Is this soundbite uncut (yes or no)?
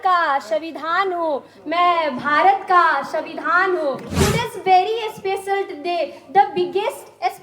no